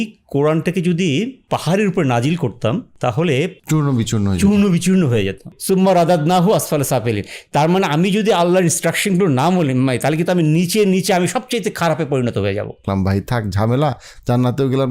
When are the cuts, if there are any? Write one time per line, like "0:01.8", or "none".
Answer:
0:05.5
0:12.8